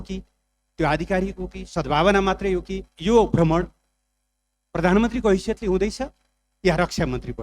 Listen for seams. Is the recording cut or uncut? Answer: cut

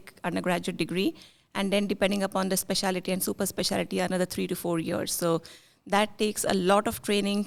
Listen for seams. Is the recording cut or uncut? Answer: uncut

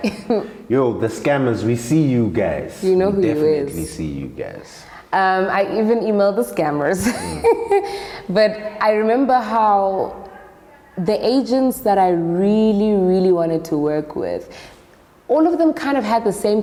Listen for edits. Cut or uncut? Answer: uncut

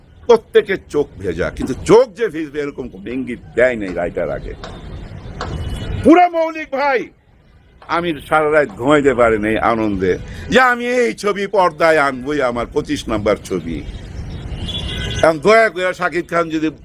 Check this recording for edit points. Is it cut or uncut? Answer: uncut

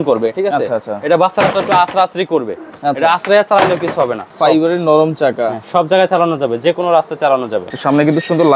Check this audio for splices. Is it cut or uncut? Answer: cut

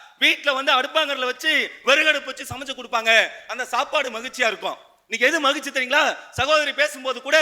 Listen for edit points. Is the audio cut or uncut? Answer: uncut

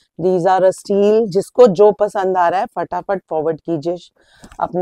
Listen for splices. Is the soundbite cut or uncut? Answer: uncut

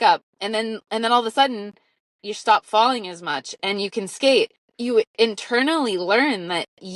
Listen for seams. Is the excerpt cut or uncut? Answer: cut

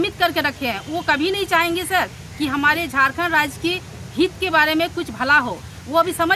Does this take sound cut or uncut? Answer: uncut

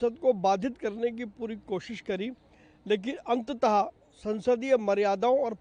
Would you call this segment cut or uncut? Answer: uncut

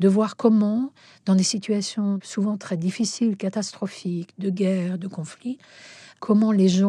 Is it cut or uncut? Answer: uncut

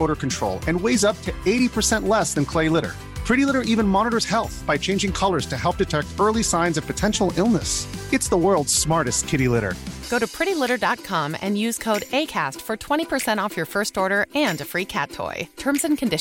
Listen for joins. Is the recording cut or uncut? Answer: uncut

